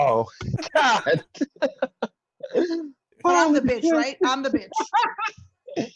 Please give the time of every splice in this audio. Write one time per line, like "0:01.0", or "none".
none